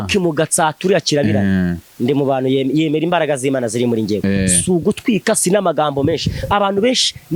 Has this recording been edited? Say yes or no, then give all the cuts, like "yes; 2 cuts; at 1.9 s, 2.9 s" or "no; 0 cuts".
no; 0 cuts